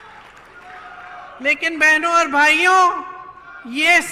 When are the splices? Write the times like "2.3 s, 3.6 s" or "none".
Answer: none